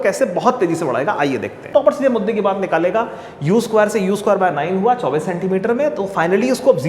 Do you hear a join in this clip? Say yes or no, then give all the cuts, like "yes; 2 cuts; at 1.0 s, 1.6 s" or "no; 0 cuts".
yes; 1 cut; at 1.6 s